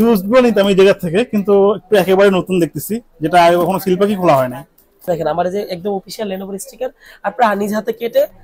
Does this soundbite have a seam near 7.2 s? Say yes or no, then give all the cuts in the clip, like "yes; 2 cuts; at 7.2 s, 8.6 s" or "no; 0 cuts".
no; 1 cut; at 5.1 s